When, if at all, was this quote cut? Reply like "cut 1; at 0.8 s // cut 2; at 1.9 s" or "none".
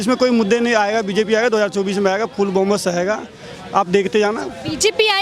none